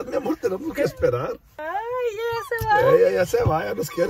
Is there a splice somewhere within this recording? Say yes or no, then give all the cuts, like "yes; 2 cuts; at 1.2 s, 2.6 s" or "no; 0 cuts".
yes; 1 cut; at 1.6 s